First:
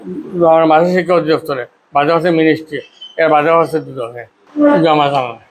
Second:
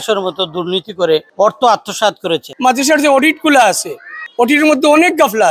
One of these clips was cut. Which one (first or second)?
second